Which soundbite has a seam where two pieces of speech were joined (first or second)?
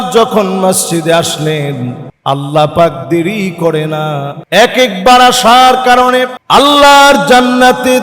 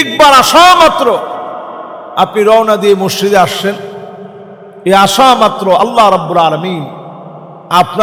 first